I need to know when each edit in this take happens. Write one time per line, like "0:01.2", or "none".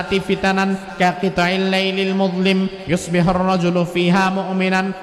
none